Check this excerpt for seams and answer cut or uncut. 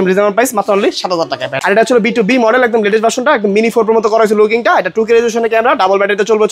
cut